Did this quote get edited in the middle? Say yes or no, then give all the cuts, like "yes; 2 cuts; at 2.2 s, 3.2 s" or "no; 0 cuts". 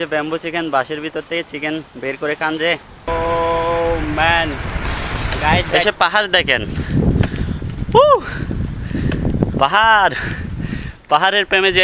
yes; 2 cuts; at 3.1 s, 5.7 s